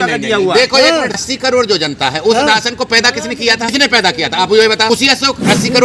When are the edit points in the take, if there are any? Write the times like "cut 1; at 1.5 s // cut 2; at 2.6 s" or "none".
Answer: cut 1; at 1.2 s // cut 2; at 3.7 s // cut 3; at 4.9 s